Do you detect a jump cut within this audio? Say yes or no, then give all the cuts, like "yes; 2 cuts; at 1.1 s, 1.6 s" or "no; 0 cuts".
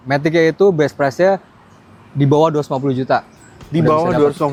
no; 0 cuts